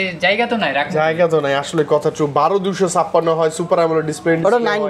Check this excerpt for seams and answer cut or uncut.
uncut